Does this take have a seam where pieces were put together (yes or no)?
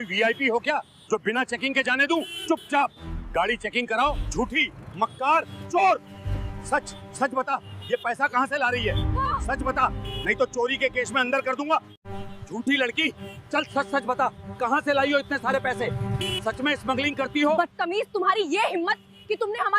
yes